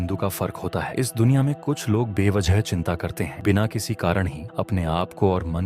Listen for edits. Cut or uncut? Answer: cut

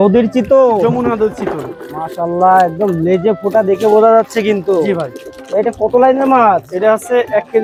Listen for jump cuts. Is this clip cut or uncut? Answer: uncut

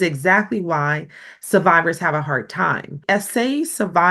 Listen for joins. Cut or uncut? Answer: cut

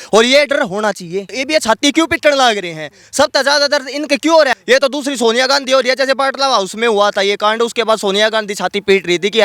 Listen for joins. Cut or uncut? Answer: cut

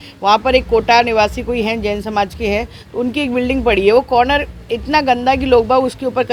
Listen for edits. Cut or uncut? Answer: uncut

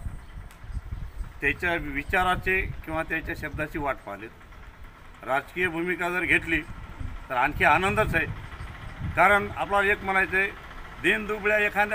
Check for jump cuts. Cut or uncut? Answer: uncut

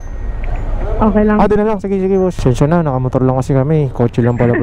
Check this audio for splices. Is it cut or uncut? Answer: cut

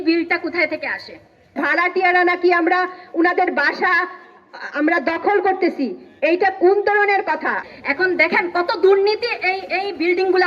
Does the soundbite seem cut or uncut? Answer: cut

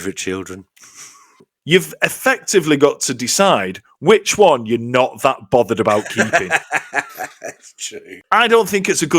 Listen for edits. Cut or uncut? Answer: cut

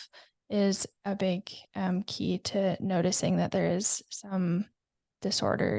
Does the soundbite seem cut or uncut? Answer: uncut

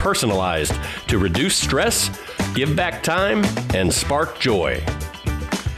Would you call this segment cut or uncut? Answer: uncut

